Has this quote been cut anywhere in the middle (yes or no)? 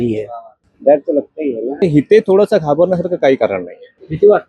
yes